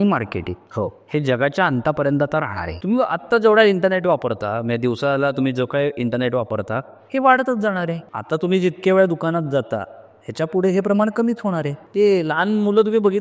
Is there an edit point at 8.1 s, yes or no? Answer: yes